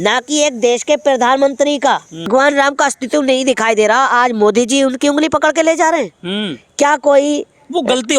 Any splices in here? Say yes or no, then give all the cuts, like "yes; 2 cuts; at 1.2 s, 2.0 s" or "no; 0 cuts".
yes; 1 cut; at 2.3 s